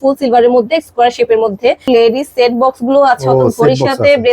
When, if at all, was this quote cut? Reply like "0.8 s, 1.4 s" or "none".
1.9 s

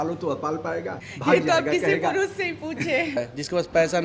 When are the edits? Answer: 1.1 s, 3.2 s

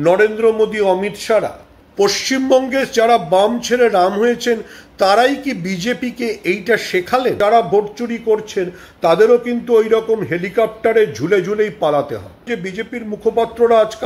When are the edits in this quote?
1.8 s, 7.4 s, 12.5 s

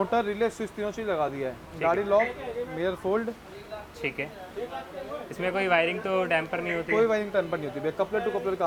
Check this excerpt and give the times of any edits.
none

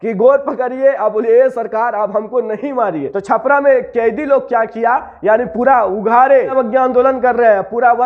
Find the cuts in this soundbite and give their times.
3.1 s, 6.5 s

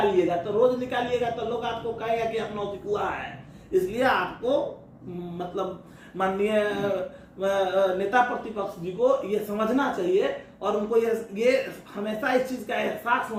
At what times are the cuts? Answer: none

